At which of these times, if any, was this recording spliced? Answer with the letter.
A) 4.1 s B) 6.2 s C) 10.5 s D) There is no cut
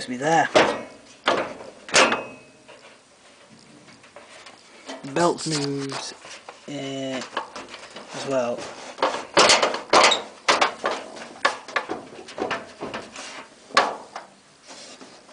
A